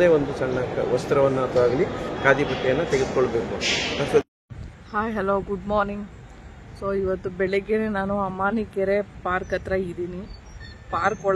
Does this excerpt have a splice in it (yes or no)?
yes